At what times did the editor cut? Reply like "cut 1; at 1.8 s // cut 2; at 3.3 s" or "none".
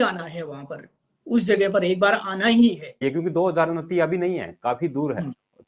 cut 1; at 3.0 s